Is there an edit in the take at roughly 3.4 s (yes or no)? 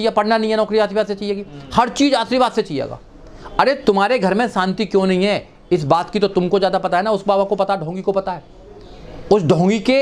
no